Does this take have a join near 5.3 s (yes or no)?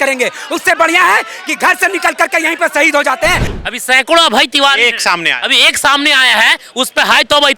no